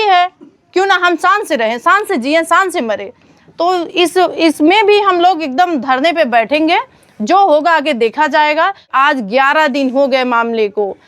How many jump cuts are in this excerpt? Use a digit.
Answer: 1